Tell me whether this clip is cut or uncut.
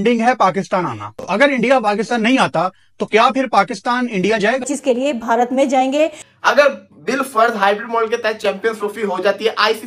cut